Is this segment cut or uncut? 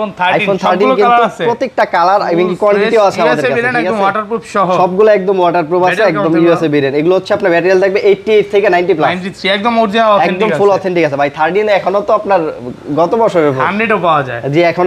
uncut